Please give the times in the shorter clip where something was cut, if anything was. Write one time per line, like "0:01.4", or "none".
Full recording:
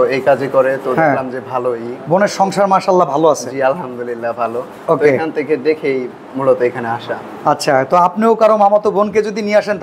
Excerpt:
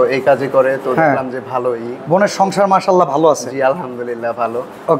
none